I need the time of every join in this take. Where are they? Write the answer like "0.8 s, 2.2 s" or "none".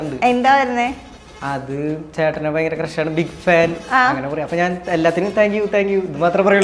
none